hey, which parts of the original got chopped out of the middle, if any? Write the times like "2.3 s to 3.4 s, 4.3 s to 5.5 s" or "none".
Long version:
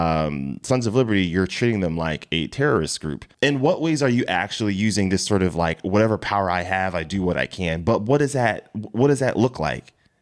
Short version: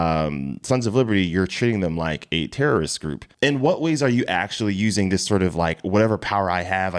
none